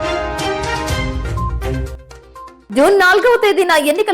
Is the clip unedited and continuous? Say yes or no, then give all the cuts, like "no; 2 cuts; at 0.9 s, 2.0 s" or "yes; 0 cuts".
no; 1 cut; at 1.7 s